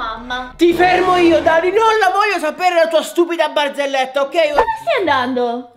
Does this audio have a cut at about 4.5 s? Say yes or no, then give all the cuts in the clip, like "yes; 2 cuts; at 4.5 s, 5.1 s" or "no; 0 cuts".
yes; 1 cut; at 4.5 s